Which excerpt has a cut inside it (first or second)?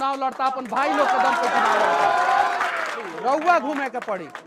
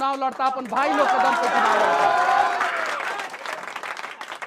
first